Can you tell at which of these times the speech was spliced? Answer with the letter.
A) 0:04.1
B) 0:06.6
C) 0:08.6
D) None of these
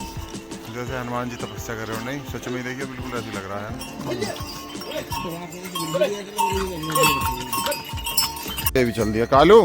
C